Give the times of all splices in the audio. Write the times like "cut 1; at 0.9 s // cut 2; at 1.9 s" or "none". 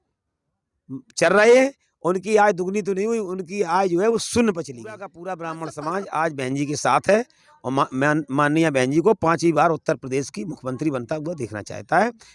cut 1; at 5.2 s